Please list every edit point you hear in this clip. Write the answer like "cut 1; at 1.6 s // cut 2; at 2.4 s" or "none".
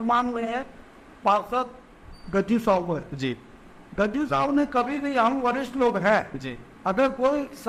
none